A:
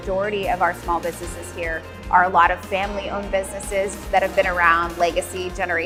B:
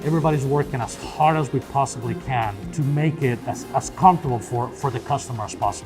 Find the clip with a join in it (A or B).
B